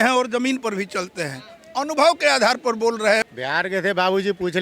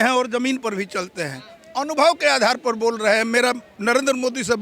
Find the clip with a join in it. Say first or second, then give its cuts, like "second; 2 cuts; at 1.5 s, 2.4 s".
first; 1 cut; at 3.3 s